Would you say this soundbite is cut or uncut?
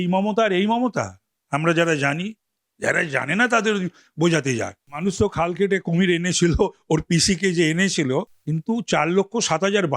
cut